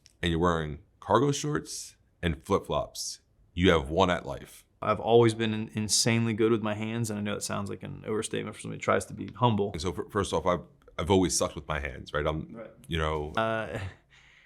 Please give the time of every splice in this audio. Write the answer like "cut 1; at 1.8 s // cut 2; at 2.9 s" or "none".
cut 1; at 4.8 s // cut 2; at 9.8 s // cut 3; at 13.4 s